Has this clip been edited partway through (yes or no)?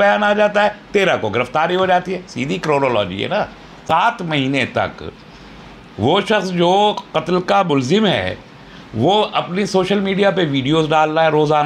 yes